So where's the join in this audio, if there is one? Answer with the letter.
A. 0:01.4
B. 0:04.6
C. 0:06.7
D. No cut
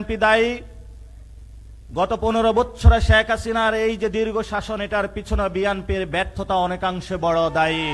D